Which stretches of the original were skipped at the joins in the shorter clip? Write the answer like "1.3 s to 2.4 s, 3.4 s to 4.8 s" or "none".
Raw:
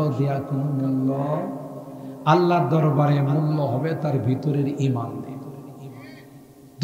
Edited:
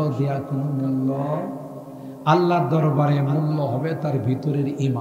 none